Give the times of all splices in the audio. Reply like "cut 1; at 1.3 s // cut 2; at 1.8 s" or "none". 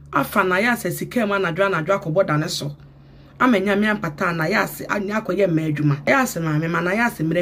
cut 1; at 6.0 s